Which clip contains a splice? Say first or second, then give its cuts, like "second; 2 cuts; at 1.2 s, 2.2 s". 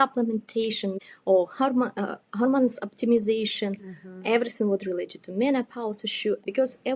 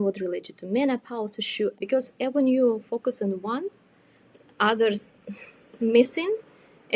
first; 1 cut; at 0.9 s